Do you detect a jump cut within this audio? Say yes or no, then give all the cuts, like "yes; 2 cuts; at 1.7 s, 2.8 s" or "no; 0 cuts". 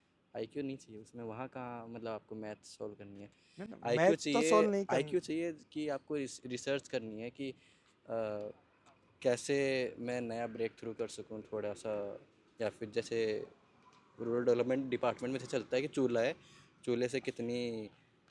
no; 0 cuts